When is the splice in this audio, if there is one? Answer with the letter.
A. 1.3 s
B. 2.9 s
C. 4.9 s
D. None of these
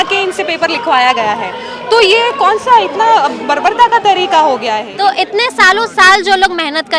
C